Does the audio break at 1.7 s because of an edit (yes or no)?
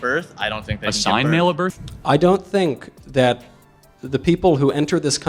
yes